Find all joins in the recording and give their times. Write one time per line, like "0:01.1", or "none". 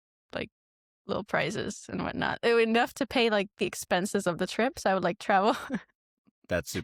none